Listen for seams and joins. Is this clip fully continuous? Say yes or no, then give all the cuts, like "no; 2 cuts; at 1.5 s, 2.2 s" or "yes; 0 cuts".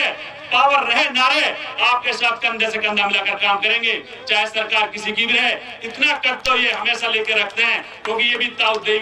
yes; 0 cuts